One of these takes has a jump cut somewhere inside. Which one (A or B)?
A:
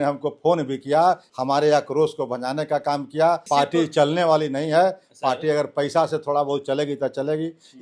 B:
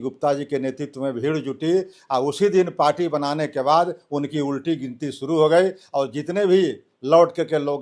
A